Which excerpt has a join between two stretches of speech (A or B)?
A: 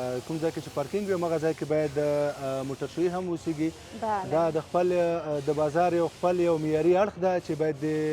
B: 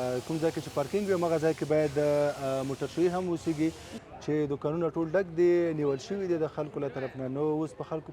B